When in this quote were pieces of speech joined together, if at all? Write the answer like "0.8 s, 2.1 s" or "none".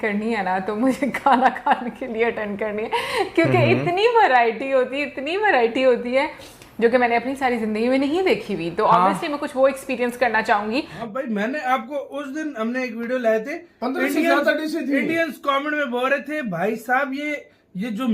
11.0 s